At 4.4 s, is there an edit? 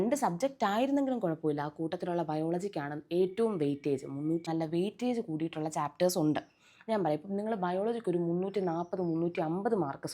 yes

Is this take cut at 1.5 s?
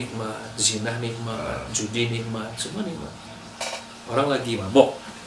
no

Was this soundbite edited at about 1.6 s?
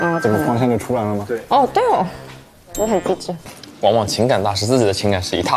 no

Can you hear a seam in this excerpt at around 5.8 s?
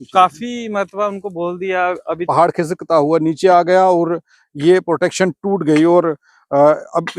no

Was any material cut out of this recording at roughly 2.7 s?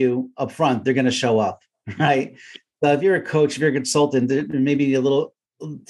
no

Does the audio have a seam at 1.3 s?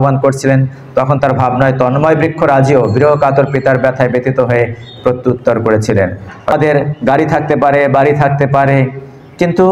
no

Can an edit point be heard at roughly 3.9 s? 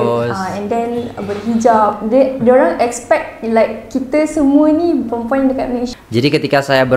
no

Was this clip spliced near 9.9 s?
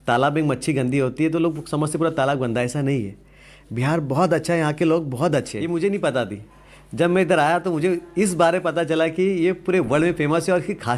no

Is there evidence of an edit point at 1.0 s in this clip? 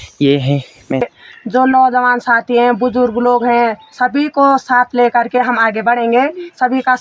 yes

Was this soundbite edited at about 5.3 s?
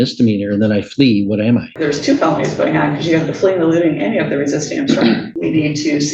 yes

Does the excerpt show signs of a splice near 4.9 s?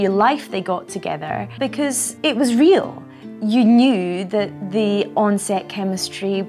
no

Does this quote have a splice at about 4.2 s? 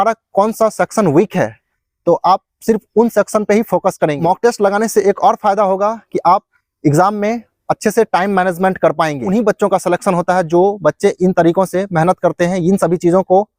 yes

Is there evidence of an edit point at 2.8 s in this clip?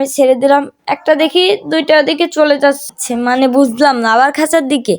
yes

